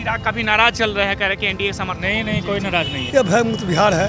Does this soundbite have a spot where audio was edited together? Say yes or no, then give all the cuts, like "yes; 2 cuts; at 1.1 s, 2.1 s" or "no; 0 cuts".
yes; 1 cut; at 3.0 s